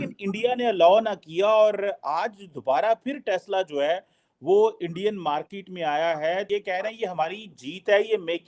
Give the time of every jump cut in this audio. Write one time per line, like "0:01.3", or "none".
0:06.5